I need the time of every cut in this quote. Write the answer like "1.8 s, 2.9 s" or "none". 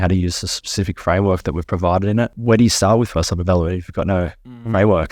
2.4 s